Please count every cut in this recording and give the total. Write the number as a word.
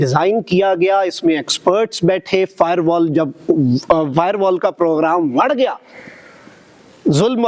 zero